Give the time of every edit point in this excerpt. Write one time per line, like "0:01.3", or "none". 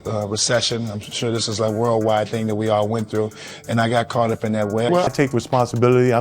0:05.1